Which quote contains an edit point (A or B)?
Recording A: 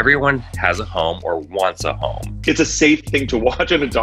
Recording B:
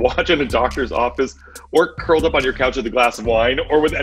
A